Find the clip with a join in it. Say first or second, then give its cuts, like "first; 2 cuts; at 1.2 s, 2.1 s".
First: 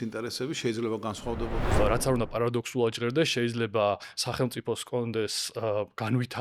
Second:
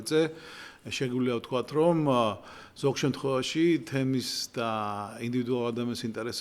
first; 1 cut; at 1.8 s